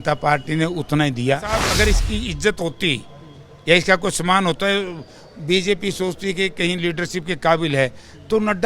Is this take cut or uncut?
cut